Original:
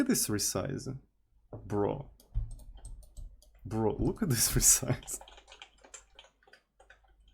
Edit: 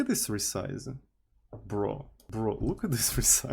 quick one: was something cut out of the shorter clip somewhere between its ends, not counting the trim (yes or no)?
yes